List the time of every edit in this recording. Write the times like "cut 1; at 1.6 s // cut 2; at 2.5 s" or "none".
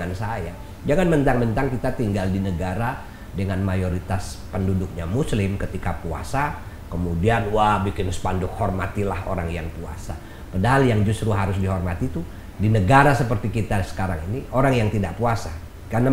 none